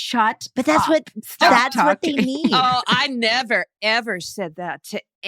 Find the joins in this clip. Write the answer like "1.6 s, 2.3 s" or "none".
none